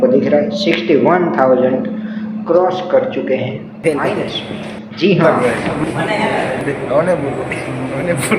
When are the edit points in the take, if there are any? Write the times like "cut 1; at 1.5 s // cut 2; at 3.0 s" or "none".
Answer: cut 1; at 5.2 s